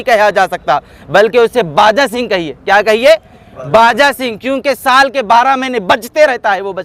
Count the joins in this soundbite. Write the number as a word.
zero